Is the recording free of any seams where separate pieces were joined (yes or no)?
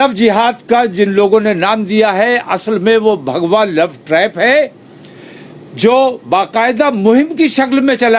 yes